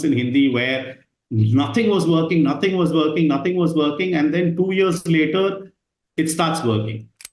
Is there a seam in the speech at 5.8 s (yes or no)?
no